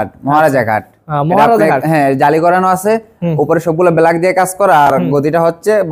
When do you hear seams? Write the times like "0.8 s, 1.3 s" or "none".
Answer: none